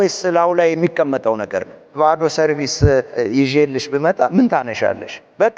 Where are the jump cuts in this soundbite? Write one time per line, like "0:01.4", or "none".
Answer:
0:02.0
0:03.1

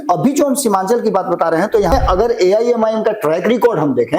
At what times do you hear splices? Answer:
0:01.9

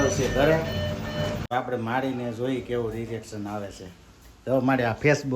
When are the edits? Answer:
0:01.4

